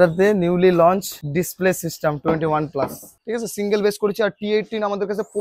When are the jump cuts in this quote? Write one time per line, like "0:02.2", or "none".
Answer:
0:01.2
0:03.1